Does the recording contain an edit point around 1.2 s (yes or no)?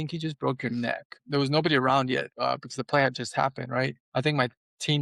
yes